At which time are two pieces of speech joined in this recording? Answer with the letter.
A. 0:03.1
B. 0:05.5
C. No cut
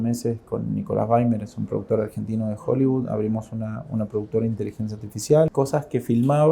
B